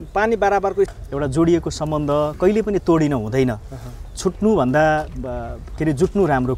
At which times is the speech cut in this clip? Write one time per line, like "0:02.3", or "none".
0:01.0